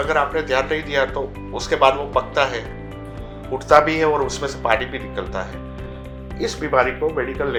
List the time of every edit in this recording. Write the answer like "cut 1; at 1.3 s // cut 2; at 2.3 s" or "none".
none